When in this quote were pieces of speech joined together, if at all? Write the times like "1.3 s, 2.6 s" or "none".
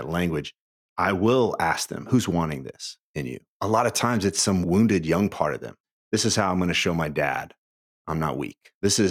0.9 s, 2.0 s, 3.6 s, 4.6 s, 5.9 s